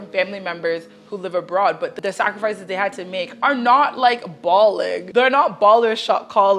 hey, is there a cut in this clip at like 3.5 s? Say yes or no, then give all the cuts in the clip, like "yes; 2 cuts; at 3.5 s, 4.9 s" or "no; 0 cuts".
no; 2 cuts; at 2.0 s, 5.0 s